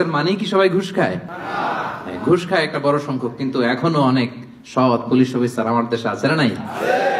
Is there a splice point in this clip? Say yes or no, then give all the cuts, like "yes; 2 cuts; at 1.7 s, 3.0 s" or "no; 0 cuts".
no; 0 cuts